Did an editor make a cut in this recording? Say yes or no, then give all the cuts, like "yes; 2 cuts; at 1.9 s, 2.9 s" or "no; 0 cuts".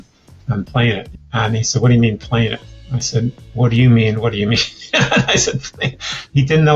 yes; 1 cut; at 1.1 s